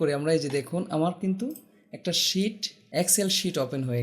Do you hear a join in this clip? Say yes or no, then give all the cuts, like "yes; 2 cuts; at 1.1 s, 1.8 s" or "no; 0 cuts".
yes; 1 cut; at 2.7 s